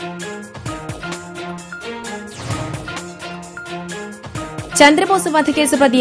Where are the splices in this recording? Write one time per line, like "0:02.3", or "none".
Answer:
none

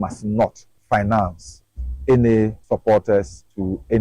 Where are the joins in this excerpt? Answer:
0:02.6

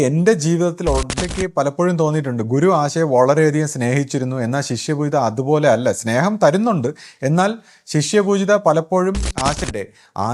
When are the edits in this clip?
0:01.1
0:09.6

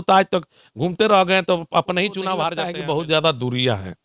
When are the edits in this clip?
0:02.6

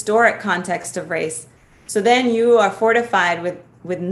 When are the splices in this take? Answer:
none

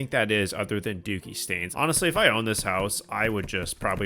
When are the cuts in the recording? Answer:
0:01.6

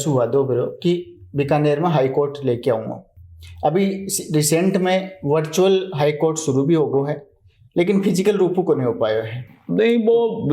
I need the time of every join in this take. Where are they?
none

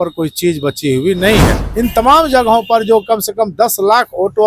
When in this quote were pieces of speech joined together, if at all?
0:01.6

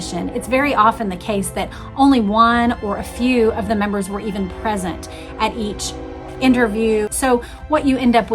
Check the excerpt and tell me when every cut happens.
0:07.1

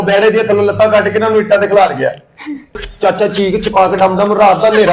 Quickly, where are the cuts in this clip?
0:02.9

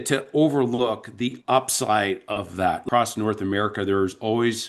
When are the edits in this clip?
0:02.8

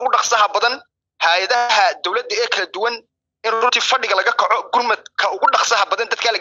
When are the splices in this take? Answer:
none

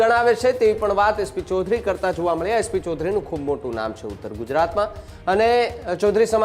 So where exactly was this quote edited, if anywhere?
none

